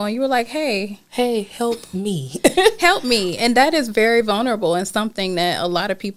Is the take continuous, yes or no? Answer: yes